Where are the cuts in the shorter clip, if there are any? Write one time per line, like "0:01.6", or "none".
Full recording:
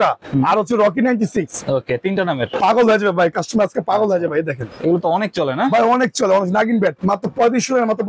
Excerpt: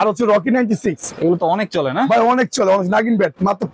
0:01.1